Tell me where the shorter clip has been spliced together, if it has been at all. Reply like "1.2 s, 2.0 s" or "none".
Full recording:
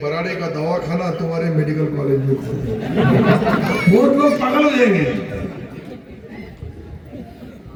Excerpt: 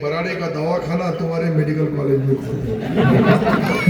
none

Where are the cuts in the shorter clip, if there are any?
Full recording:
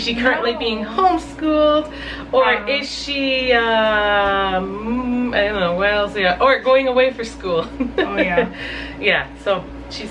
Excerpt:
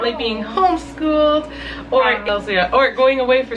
2.3 s

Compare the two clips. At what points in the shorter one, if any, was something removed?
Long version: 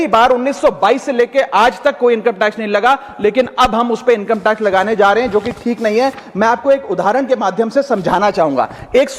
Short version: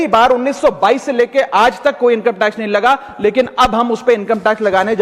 none

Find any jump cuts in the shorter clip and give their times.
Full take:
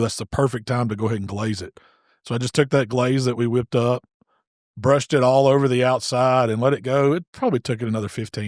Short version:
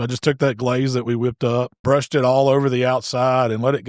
1.7 s

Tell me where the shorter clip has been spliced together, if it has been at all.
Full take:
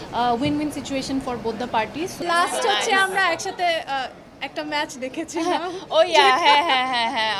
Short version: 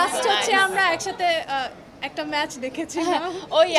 none

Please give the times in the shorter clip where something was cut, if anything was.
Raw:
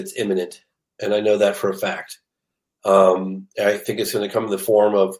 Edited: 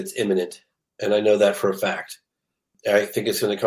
2.7 s

